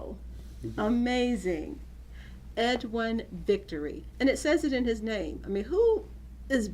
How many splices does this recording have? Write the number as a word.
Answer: one